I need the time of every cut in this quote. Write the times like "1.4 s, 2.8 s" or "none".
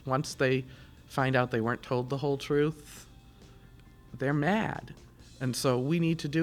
none